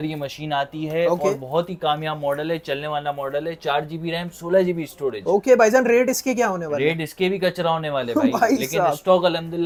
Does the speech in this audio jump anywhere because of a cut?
no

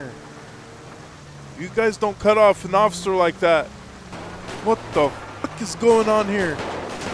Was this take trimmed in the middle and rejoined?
no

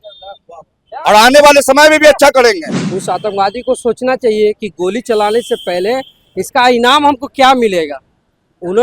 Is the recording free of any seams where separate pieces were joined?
no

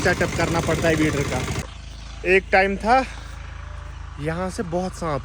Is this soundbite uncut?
no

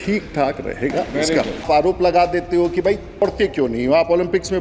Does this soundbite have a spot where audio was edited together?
yes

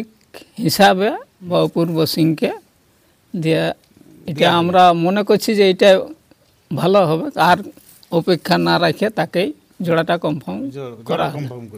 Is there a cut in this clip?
yes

